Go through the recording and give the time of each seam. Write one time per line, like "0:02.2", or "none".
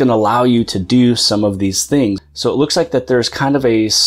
0:02.3